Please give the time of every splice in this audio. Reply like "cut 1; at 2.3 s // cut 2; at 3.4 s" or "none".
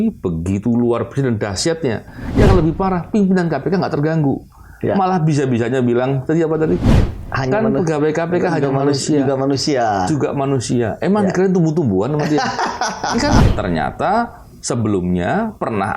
cut 1; at 13.4 s

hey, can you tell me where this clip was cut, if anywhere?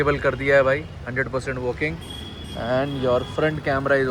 none

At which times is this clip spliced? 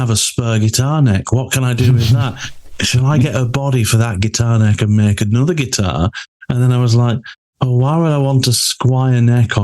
none

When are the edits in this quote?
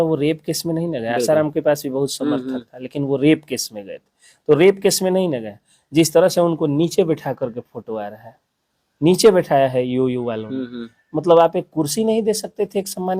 none

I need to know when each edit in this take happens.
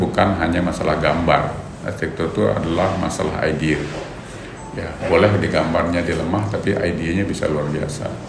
none

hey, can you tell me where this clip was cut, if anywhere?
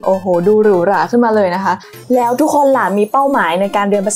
cut 1; at 1.9 s

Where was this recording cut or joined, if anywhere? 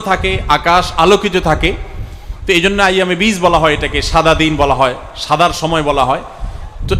none

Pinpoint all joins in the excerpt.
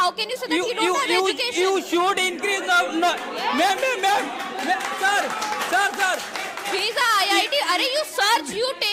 none

